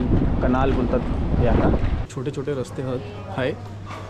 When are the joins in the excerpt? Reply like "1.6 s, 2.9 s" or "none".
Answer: 2.1 s